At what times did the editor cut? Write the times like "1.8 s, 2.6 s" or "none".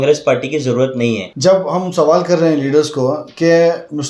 1.3 s

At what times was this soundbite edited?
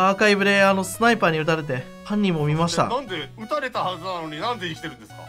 1.9 s, 3.3 s

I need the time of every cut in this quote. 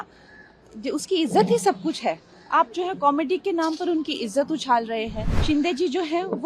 5.3 s

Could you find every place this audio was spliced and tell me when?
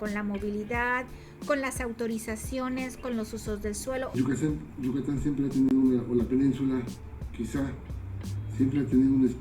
4.2 s

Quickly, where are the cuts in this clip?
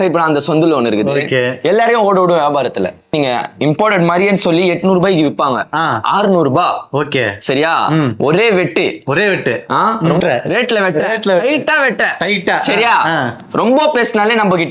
3.1 s, 10.2 s

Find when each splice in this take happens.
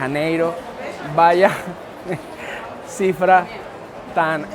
none

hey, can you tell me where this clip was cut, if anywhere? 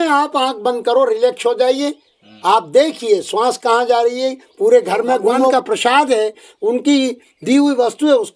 5.5 s

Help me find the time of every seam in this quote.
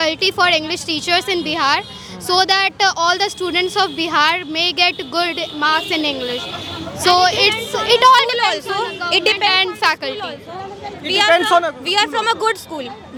none

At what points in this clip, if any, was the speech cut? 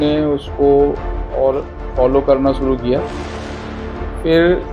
none

